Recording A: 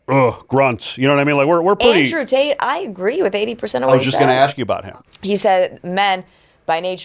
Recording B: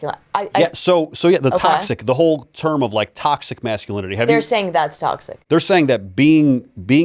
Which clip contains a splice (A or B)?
A